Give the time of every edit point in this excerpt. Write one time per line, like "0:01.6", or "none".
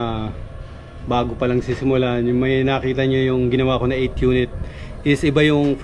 none